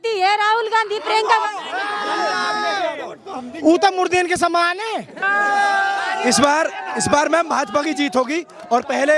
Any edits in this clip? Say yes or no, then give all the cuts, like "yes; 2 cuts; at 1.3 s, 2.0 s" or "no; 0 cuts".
no; 0 cuts